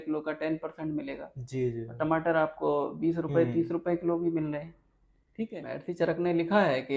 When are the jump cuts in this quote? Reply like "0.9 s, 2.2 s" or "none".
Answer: 5.5 s